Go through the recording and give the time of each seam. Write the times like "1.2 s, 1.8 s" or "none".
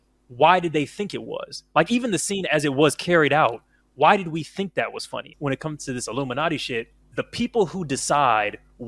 5.3 s, 7.0 s

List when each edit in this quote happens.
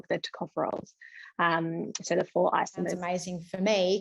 3.0 s

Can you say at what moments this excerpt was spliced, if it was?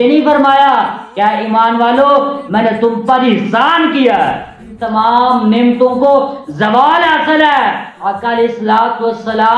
4.4 s

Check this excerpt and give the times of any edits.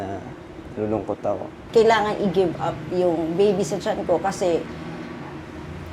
1.6 s

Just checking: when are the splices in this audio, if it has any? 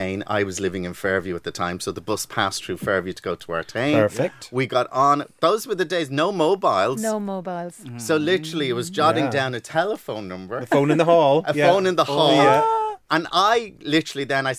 none

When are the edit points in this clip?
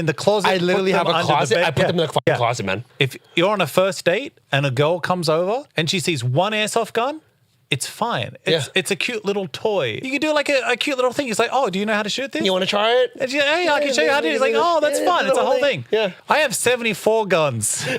5.7 s, 9.9 s, 16.2 s

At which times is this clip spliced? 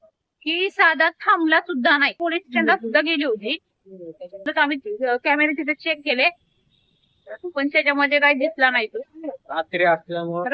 2.2 s, 4.4 s

